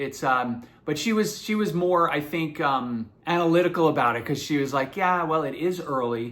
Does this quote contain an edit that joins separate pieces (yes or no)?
yes